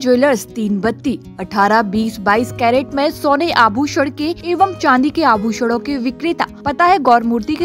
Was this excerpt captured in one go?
no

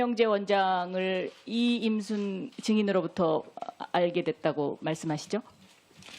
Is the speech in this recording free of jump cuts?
no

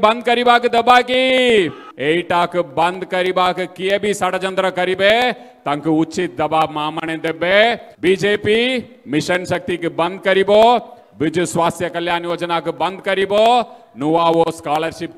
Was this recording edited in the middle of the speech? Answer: yes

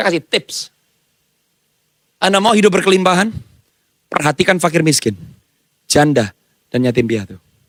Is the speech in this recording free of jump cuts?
yes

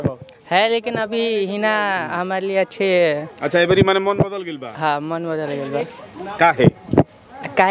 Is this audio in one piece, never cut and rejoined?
yes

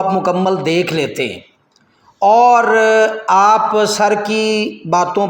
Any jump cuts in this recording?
no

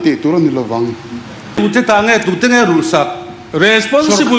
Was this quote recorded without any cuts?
no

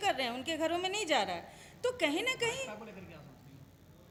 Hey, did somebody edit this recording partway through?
no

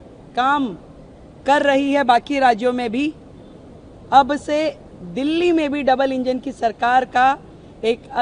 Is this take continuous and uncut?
yes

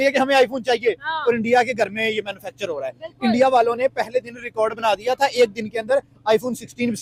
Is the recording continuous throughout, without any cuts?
yes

